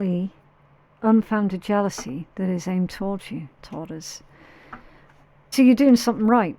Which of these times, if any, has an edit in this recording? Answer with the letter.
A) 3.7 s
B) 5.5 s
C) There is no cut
B